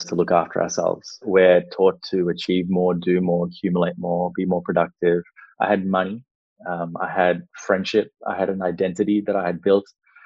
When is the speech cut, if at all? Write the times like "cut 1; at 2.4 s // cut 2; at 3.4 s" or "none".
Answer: cut 1; at 1.2 s // cut 2; at 5.4 s